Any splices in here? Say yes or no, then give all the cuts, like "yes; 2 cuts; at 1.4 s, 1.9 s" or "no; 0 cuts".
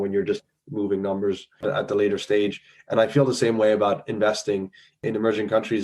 yes; 1 cut; at 1.5 s